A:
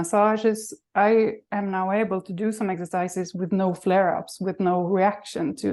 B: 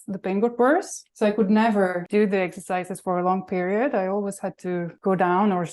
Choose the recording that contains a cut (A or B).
B